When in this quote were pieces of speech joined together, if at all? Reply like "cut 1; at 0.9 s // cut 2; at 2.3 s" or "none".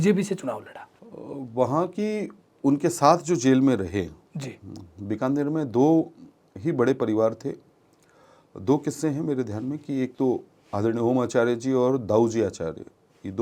cut 1; at 0.9 s